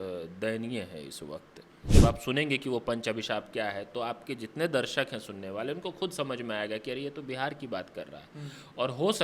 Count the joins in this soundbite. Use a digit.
1